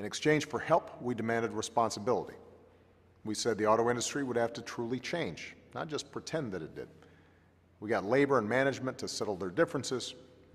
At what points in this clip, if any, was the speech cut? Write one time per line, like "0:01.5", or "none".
none